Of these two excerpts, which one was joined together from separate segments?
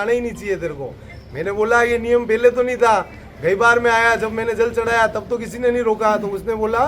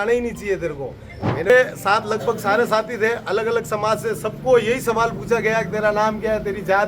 second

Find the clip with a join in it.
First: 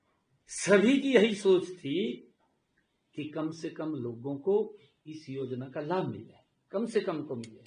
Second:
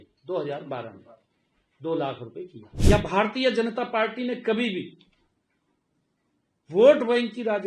second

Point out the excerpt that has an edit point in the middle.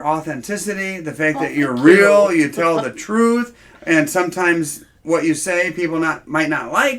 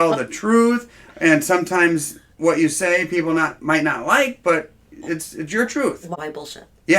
second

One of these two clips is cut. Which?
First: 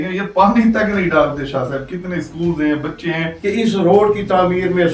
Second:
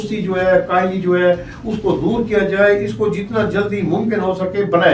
first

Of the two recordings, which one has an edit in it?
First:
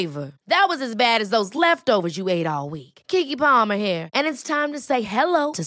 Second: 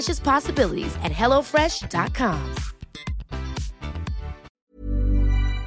second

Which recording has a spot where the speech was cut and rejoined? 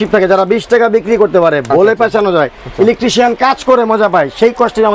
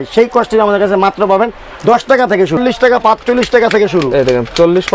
second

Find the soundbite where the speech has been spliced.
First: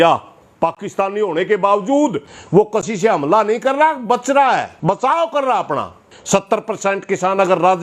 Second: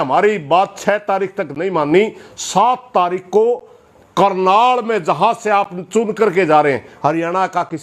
first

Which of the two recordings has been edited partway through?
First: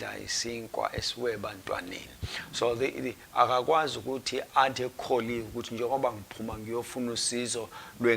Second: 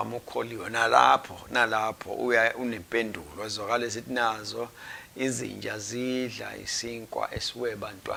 first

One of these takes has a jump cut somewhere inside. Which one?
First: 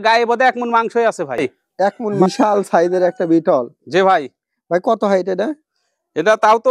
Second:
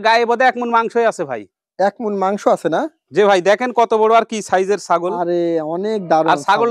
first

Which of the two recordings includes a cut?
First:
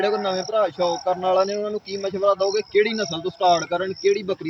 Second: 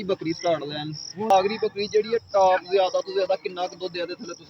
second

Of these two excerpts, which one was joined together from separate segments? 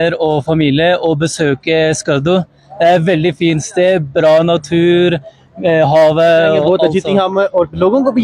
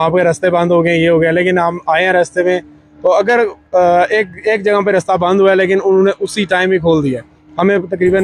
first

